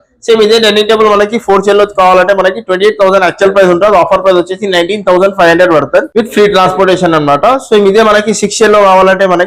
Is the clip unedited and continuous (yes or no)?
yes